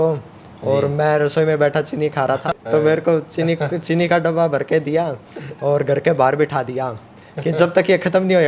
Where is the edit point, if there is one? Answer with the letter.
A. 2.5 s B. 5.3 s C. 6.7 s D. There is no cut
A